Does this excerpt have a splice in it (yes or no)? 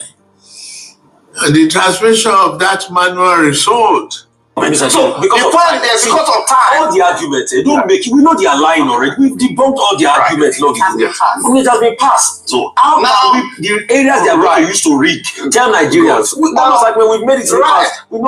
yes